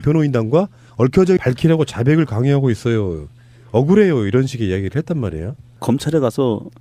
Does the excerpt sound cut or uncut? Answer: uncut